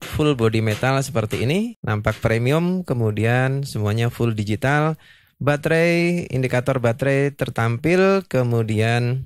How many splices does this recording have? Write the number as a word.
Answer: zero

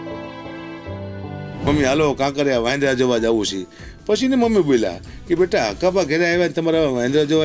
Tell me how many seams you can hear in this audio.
one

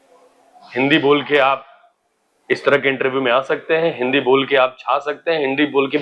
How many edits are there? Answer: zero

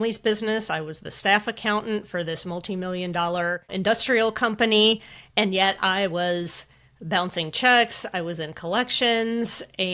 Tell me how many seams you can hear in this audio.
one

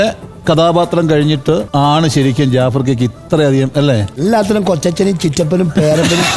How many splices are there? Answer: two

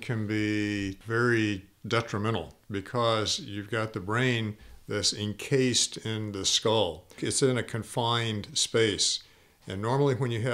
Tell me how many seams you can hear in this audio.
two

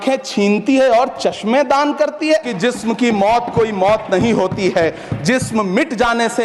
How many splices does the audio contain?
one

